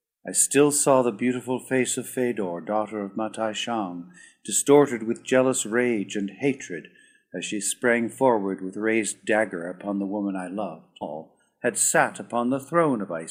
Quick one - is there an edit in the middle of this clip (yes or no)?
no